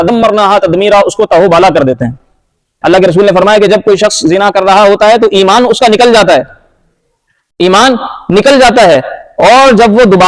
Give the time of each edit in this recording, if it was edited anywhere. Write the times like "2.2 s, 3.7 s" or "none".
2.7 s